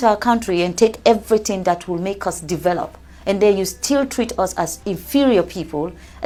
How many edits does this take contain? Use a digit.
0